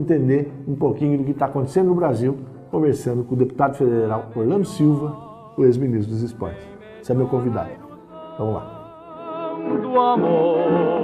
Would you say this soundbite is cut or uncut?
cut